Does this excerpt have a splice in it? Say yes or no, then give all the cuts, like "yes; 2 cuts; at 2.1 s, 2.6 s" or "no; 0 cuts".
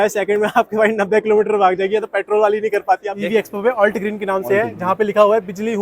yes; 1 cut; at 3.1 s